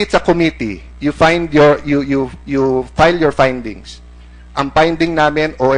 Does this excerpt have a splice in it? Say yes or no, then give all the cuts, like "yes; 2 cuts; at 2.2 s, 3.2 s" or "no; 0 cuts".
no; 0 cuts